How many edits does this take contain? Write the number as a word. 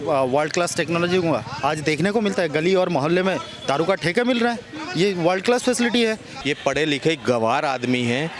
one